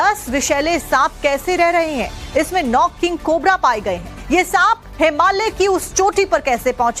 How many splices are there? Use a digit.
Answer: 1